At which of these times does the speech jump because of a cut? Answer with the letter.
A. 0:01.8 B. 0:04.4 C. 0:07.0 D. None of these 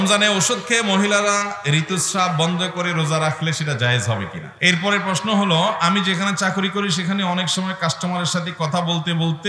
B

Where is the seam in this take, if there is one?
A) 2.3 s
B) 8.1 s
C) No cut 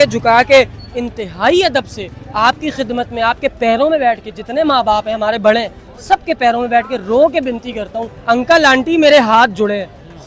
B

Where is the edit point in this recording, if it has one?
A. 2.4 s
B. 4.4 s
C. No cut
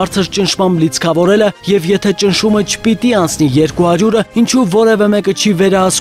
C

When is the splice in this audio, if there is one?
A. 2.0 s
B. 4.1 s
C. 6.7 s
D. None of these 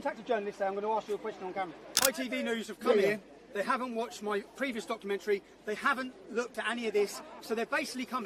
A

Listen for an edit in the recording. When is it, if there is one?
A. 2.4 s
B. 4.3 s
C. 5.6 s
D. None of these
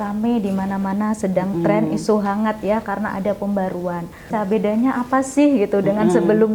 B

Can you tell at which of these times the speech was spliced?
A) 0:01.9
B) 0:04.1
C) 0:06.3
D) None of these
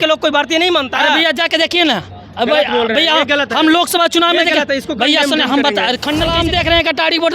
C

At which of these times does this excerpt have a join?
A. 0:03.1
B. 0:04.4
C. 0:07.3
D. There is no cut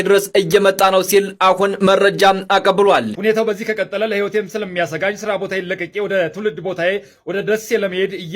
A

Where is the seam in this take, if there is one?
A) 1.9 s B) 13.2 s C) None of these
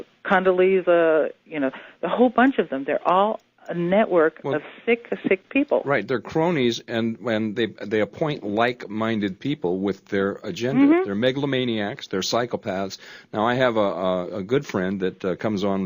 A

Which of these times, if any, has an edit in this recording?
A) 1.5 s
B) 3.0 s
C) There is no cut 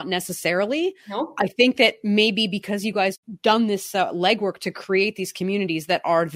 C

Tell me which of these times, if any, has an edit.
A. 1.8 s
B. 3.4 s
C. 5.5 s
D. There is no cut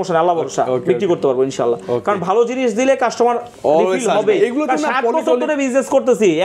D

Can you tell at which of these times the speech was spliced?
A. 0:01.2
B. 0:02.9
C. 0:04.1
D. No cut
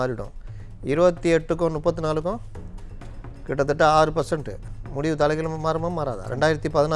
D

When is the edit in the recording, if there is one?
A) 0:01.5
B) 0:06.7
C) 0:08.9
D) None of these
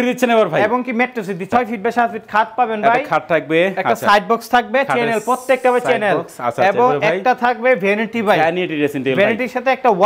A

